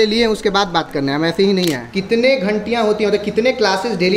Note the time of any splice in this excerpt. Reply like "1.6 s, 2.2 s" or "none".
1.8 s

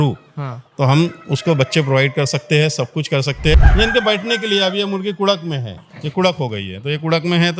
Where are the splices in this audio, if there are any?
3.6 s

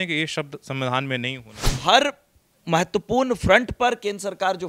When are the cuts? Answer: 1.8 s

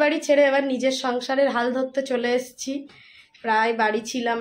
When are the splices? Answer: none

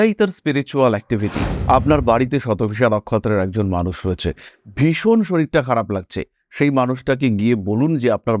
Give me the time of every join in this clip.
1.5 s

